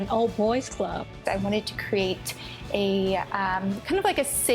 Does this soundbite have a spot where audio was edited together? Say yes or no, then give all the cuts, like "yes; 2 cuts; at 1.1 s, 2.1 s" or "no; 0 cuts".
yes; 1 cut; at 1.1 s